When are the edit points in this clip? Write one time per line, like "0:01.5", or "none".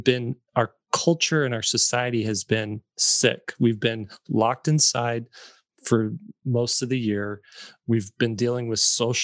none